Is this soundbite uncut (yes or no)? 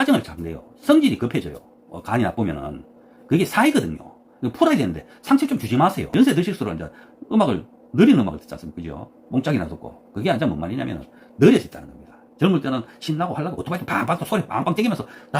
no